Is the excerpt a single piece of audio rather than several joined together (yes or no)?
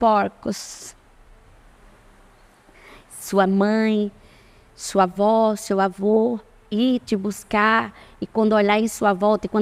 yes